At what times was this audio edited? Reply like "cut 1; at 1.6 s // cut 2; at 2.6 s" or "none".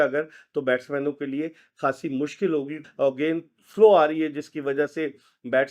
cut 1; at 2.8 s